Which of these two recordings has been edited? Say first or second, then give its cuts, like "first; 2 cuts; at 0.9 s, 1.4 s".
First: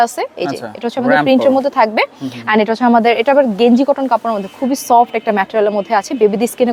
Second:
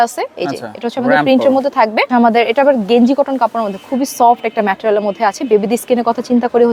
second; 1 cut; at 2.1 s